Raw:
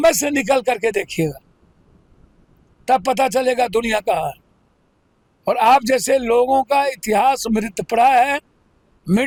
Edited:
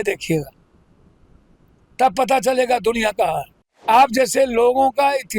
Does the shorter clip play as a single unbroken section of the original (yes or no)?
no